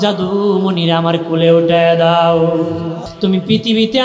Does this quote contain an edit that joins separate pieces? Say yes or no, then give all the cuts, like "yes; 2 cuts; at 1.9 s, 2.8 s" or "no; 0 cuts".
yes; 1 cut; at 3.1 s